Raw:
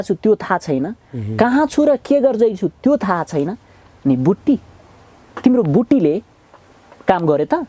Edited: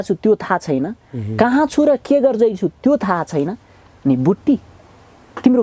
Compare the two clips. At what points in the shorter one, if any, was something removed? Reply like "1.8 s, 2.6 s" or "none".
none